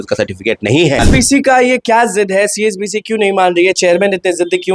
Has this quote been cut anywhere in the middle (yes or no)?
yes